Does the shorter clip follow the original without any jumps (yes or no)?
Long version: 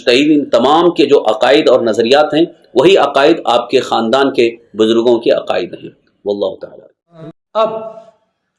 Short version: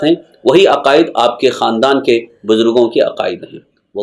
yes